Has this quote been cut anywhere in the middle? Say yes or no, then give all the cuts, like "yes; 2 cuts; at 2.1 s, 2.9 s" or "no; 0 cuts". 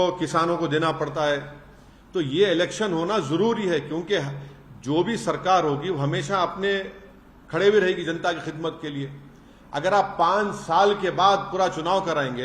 no; 0 cuts